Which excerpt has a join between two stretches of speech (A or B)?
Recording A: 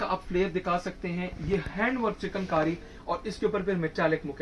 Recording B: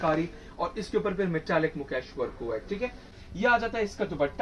B